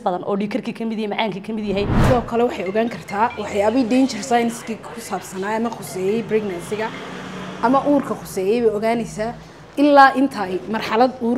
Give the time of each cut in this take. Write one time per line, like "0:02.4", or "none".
0:02.0